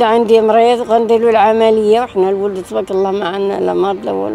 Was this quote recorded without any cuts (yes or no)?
yes